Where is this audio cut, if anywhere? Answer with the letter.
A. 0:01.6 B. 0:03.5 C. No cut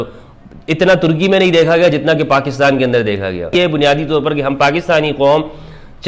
B